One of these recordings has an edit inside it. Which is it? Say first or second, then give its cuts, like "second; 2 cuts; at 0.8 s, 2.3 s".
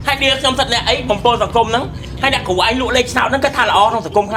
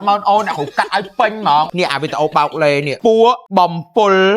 second; 3 cuts; at 1.7 s, 2.9 s, 3.4 s